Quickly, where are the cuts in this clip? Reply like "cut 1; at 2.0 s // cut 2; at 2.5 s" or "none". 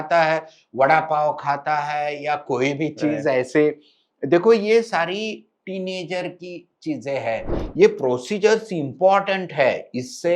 cut 1; at 7.6 s